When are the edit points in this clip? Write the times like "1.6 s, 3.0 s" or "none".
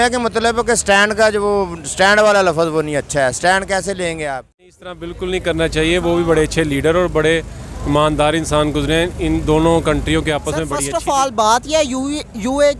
4.8 s, 10.7 s